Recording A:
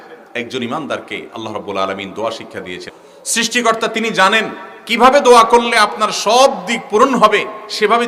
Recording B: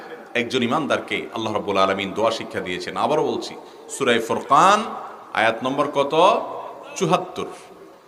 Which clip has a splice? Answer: A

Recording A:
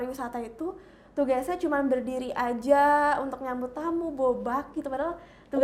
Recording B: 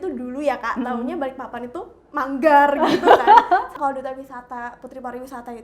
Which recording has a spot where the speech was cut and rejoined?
B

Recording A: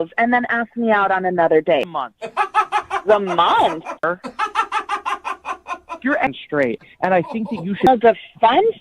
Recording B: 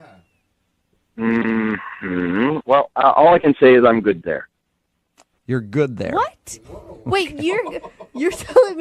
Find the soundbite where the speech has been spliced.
A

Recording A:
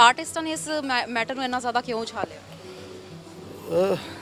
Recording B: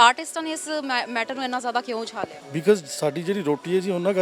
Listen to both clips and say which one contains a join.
B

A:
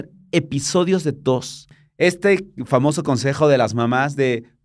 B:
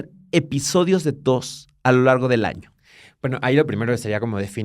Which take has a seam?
A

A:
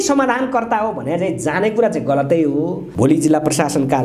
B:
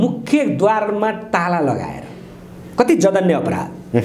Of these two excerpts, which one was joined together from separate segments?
A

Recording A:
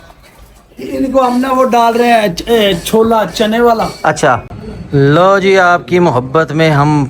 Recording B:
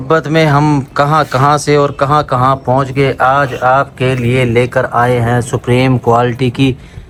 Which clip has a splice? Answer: A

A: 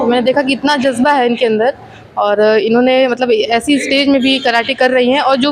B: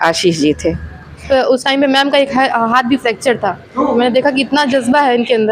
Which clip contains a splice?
B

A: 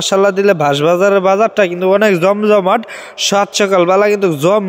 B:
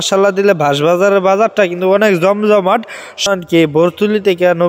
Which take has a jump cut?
B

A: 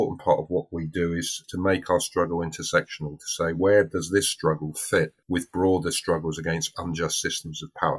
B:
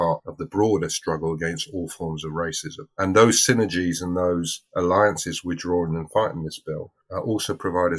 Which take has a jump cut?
A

